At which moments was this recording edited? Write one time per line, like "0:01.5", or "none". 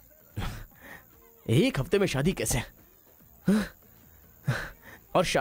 none